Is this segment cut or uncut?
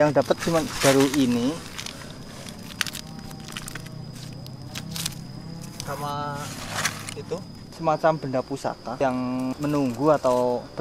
cut